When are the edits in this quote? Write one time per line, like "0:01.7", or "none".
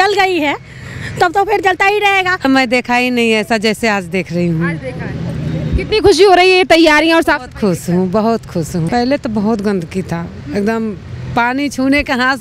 0:02.4
0:08.9